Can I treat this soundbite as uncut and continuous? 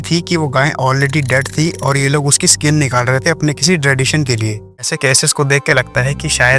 no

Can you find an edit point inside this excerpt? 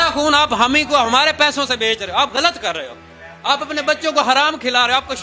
no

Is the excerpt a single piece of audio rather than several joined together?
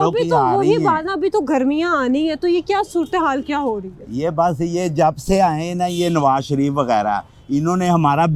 yes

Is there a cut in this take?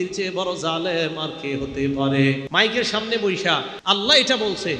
yes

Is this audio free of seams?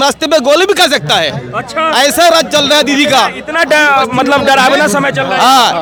yes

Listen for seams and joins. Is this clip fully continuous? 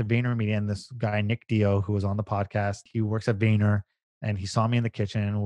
no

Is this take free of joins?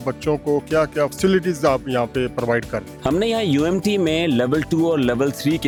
yes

